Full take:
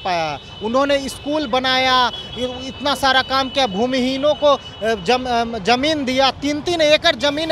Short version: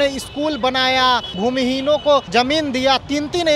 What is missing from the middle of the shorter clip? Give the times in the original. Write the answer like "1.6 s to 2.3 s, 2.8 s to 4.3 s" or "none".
2.3 s to 3.7 s, 4.6 s to 5.6 s